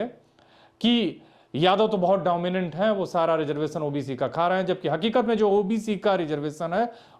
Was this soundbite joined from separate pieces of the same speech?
no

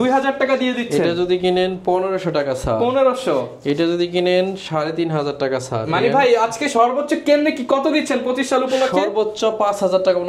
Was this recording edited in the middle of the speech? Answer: no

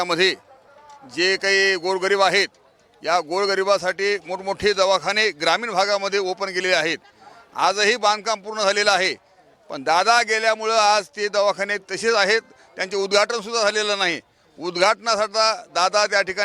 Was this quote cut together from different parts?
no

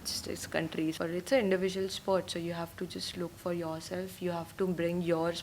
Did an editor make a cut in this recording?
yes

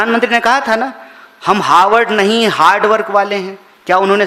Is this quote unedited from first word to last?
yes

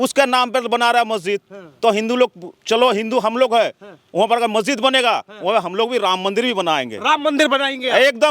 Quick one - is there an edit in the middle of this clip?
no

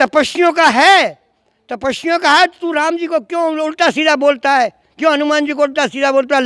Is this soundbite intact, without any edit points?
yes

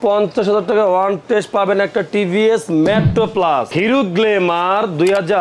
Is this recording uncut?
no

